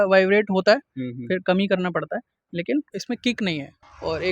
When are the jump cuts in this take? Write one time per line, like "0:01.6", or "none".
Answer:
0:03.4